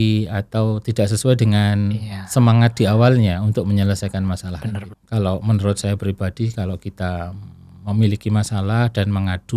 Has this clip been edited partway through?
yes; 1 cut; at 4.9 s

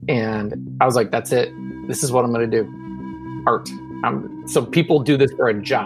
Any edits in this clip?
no; 0 cuts

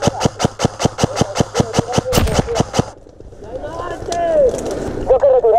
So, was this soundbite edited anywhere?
no; 0 cuts

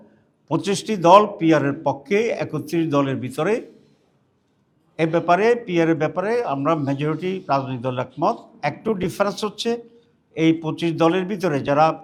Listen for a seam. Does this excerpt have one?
no; 0 cuts

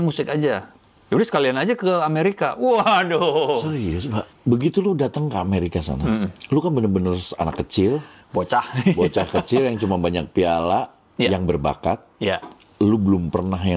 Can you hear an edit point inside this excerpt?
yes; 1 cut; at 4.3 s

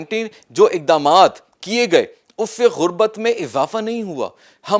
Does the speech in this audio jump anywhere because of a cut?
no; 0 cuts

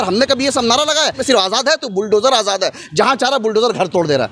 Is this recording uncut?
no; 1 cut; at 1.2 s

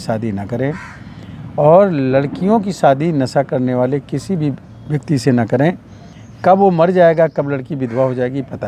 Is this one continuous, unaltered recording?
yes; 0 cuts

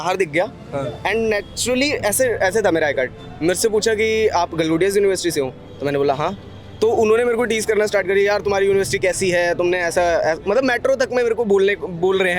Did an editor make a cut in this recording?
no; 0 cuts

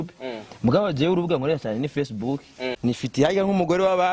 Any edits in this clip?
yes; 1 cut; at 2.8 s

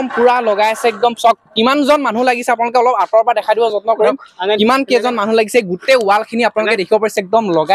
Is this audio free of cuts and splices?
yes; 0 cuts

